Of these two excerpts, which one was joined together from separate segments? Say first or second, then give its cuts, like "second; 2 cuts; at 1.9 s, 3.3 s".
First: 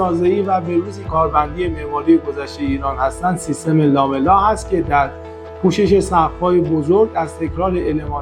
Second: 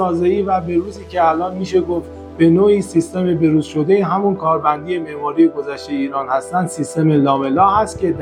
first; 1 cut; at 1.1 s